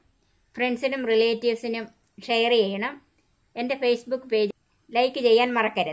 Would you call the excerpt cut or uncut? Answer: cut